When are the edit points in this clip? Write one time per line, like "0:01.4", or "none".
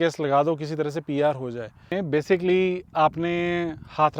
0:01.9